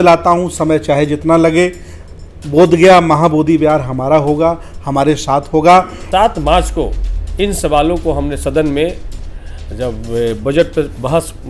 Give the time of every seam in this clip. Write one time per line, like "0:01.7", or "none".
0:06.0